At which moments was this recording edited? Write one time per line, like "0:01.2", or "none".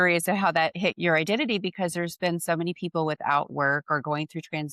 0:00.9